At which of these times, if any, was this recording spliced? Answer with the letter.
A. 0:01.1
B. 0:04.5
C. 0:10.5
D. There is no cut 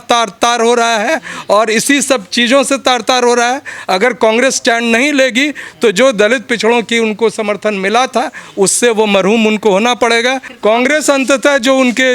C